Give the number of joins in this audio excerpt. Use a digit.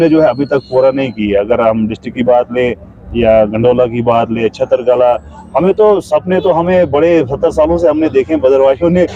0